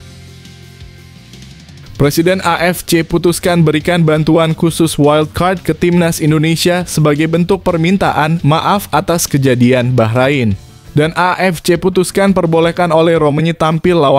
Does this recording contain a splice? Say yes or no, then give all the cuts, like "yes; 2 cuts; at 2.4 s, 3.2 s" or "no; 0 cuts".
yes; 1 cut; at 1.8 s